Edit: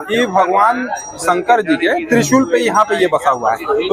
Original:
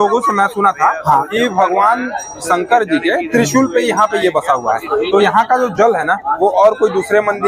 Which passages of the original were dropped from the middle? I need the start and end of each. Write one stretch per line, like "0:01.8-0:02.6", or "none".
none